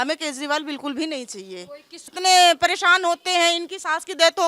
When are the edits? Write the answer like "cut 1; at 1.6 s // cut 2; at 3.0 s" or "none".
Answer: cut 1; at 1.9 s